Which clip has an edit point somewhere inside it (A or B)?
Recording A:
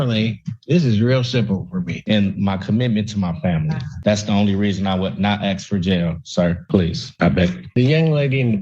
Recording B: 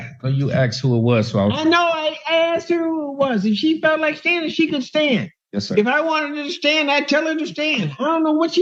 A